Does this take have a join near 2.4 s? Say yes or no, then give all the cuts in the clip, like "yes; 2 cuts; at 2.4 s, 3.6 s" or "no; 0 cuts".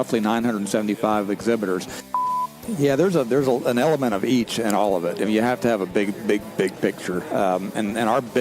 yes; 1 cut; at 2.4 s